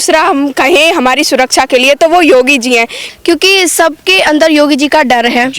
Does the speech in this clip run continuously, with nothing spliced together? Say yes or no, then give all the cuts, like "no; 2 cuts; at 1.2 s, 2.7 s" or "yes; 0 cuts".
no; 1 cut; at 3.0 s